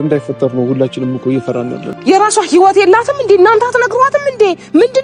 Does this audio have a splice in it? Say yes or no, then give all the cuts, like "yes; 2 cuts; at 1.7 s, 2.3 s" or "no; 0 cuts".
yes; 1 cut; at 1.8 s